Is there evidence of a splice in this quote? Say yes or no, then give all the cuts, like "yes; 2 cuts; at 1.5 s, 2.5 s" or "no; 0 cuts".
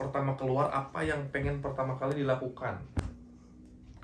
no; 0 cuts